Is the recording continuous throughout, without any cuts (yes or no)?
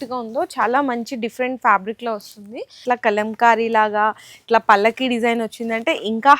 no